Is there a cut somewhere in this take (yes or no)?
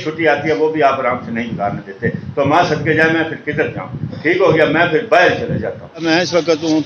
yes